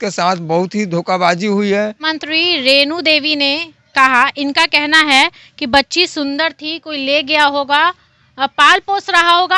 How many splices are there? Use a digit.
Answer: 1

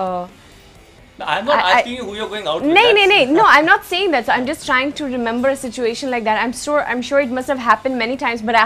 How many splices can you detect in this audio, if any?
0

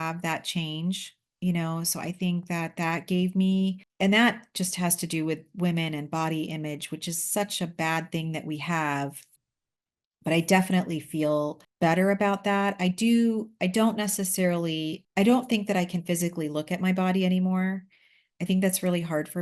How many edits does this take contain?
1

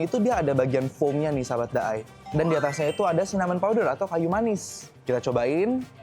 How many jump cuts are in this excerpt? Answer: 1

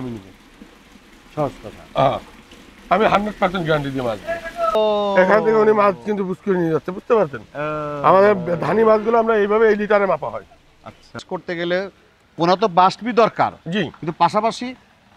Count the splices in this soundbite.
2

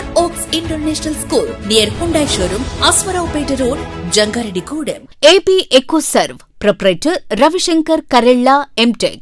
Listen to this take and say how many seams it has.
1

